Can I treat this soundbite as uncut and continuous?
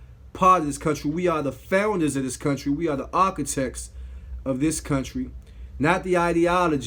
yes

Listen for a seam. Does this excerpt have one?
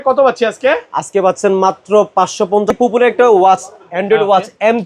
yes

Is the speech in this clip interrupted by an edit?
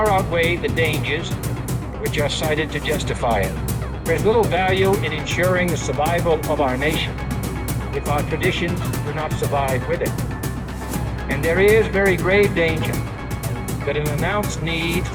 no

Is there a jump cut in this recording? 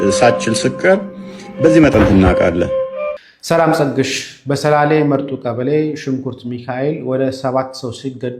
yes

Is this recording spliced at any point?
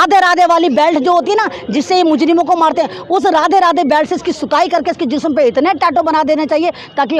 no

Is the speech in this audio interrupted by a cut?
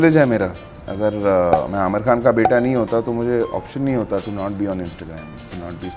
no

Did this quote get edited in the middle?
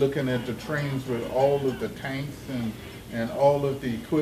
no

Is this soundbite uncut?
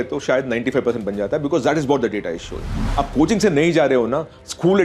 no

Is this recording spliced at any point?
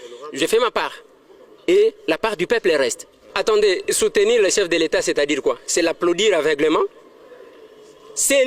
no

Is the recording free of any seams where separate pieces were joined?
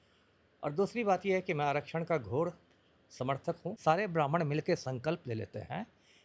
no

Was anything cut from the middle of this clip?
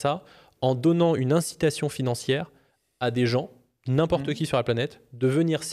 no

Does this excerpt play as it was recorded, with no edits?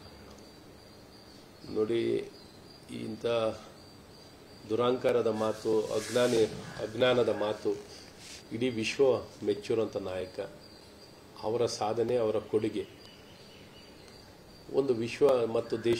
no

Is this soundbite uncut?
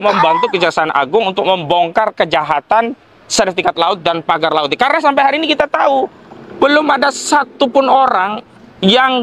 yes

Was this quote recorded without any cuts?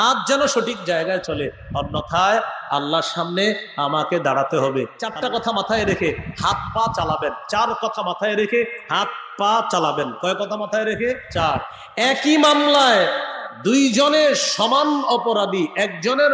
no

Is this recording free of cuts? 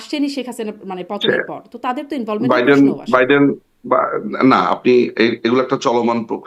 yes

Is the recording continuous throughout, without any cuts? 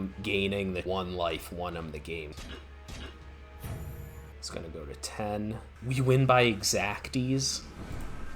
no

